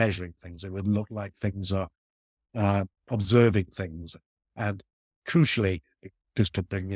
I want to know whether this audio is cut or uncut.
uncut